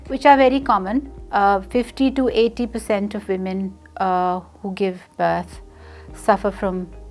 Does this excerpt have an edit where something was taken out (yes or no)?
no